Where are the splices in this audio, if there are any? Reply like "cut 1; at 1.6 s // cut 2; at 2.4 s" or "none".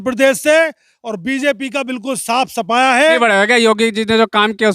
cut 1; at 3.0 s